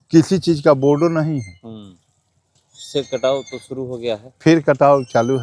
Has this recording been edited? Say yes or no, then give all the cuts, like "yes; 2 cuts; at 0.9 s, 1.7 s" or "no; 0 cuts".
no; 0 cuts